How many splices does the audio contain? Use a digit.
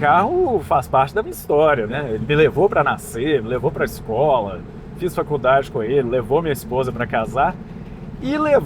1